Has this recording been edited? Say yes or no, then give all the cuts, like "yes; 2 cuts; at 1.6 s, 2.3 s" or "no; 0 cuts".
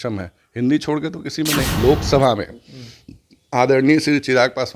yes; 1 cut; at 1.7 s